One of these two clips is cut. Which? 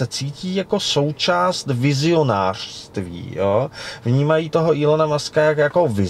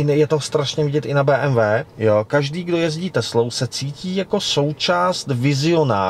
second; 1 cut; at 1.9 s

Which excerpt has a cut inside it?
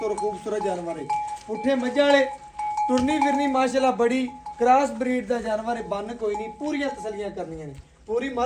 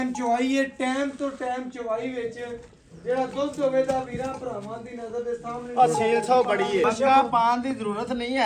second; 1 cut; at 6.8 s

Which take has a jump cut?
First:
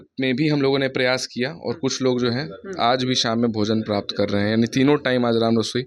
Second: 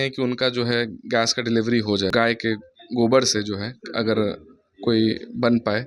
second; 1 cut; at 2.1 s

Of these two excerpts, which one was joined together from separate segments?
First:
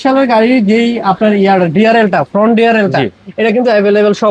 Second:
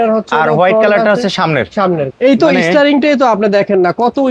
second; 1 cut; at 2.1 s

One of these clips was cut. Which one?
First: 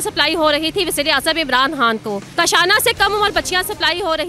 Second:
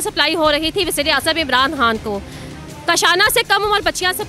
first; 1 cut; at 2.3 s

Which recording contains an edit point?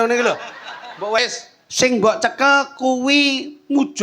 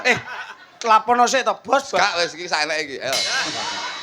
first; 1 cut; at 1.2 s

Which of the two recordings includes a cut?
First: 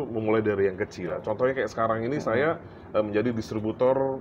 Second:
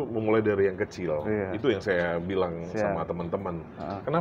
first; 1 cut; at 1.2 s

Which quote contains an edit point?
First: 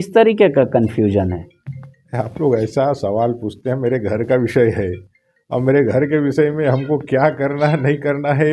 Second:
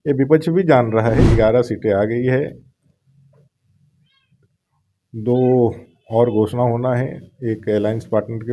second; 1 cut; at 1.3 s

